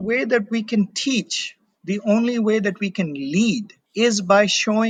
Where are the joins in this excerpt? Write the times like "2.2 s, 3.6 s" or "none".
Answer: none